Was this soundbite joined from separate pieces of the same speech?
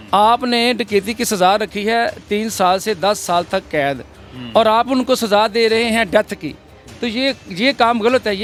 no; 0 cuts

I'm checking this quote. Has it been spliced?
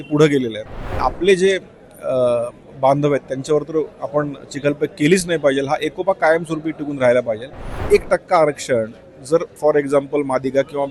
yes; 2 cuts; at 1.0 s, 7.7 s

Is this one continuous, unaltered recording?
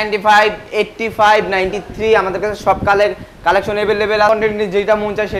no; 1 cut; at 4.3 s

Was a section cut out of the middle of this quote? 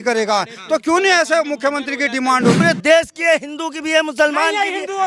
yes; 1 cut; at 2.6 s

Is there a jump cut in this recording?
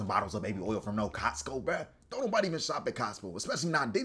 no; 0 cuts

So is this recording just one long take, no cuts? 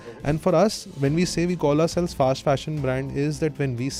yes; 0 cuts

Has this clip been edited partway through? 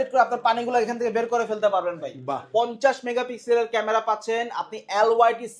yes; 1 cut; at 2.4 s

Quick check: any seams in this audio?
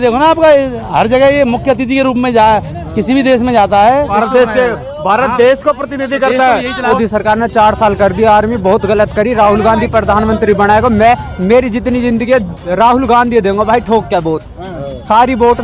yes; 2 cuts; at 4.1 s, 6.9 s

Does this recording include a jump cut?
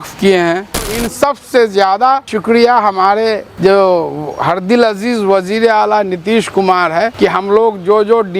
yes; 4 cuts; at 1.3 s, 2.3 s, 3.5 s, 7.1 s

